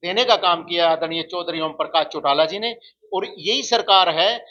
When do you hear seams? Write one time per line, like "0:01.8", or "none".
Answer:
none